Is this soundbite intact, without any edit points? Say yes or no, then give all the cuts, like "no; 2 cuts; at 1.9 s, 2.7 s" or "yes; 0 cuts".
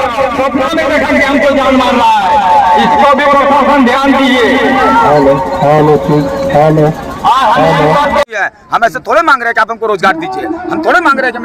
no; 1 cut; at 8.4 s